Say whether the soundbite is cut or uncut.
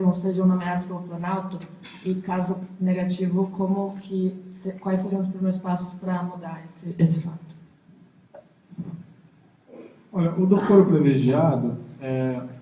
uncut